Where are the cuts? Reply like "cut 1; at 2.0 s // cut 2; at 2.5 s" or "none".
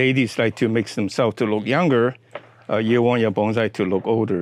none

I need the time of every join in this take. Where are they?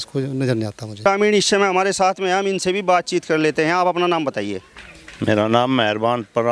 none

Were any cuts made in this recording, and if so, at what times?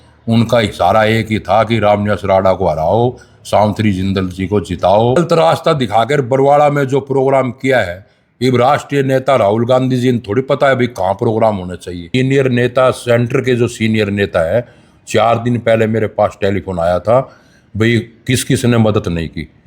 cut 1; at 5.2 s // cut 2; at 12.1 s

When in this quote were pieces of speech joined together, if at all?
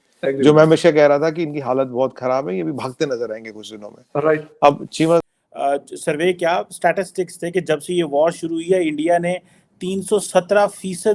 cut 1; at 5.3 s

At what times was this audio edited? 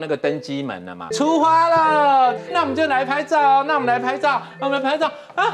cut 1; at 1.0 s

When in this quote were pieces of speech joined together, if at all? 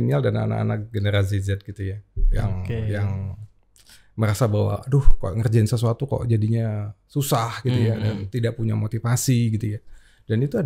none

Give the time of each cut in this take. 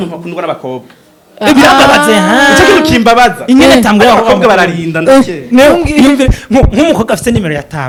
none

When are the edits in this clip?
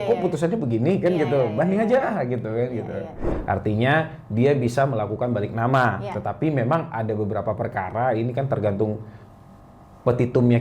cut 1; at 3.3 s

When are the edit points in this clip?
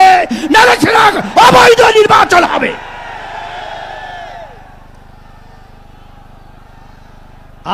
none

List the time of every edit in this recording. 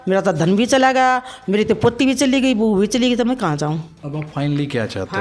cut 1; at 4.0 s

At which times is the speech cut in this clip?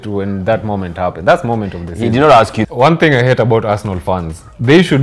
cut 1; at 2.6 s

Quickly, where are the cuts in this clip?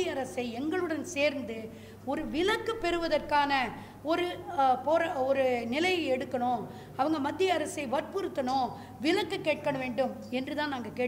none

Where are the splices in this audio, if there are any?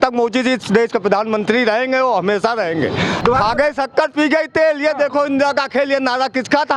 cut 1; at 3.1 s

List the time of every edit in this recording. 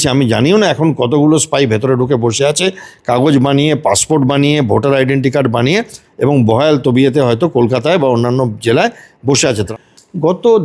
cut 1; at 9.7 s

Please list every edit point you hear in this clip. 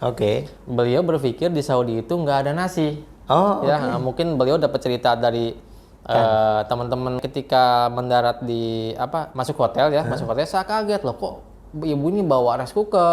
cut 1; at 7.2 s

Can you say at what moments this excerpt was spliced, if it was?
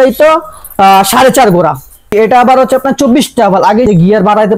cut 1; at 1.9 s // cut 2; at 3.9 s

